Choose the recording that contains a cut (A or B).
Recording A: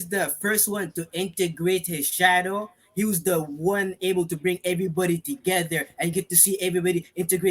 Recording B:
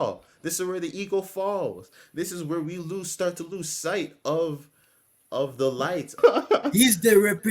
B